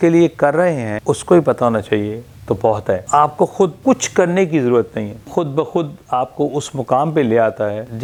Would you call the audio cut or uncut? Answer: uncut